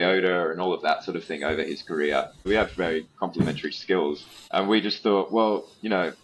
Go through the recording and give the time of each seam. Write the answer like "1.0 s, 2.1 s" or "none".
2.4 s, 4.3 s